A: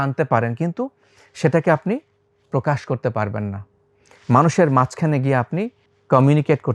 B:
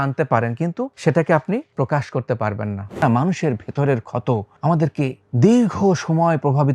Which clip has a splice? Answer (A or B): B